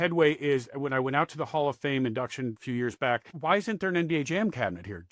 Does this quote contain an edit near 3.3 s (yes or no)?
yes